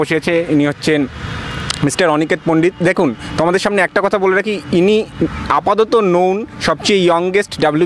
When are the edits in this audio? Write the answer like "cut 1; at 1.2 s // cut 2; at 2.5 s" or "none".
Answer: none